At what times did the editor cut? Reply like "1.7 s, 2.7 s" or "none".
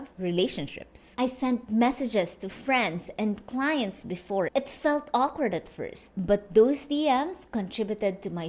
4.5 s